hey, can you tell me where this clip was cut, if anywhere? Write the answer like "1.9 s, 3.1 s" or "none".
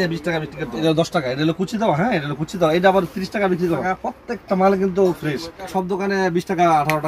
0.8 s, 3.9 s, 5.7 s